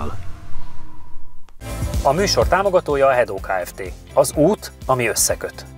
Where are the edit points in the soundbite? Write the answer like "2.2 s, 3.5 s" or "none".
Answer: 1.6 s

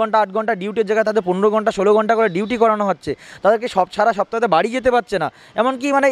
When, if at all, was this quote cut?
none

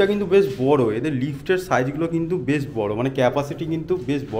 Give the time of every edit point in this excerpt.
none

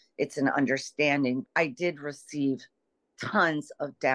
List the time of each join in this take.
1.5 s

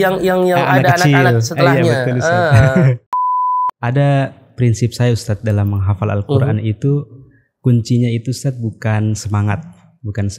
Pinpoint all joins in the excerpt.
3.2 s

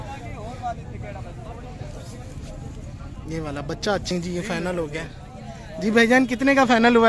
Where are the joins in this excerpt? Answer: 4.1 s

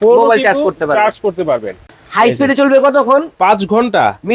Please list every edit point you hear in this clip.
1.8 s

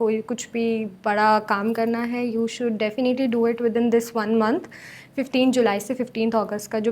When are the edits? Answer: none

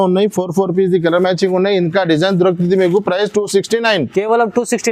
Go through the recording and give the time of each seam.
none

